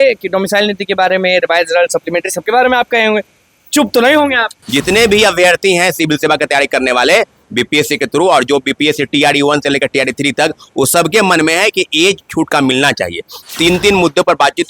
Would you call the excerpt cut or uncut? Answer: cut